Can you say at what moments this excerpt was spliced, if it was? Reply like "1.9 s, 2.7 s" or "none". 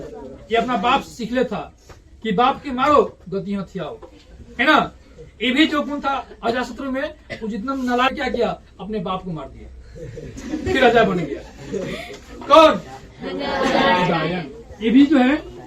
8.1 s